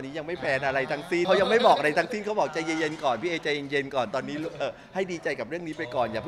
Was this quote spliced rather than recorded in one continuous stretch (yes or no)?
yes